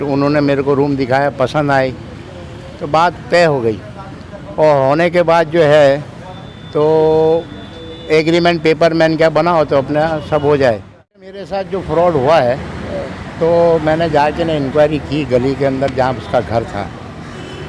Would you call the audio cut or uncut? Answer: cut